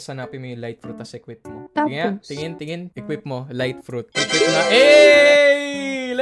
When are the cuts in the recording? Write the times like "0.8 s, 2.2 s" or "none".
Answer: 1.6 s, 2.9 s, 4.1 s